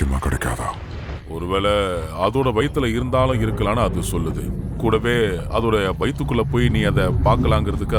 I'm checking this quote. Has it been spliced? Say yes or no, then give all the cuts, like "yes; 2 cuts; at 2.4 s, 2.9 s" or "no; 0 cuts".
no; 0 cuts